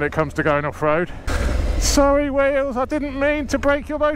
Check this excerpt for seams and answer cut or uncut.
cut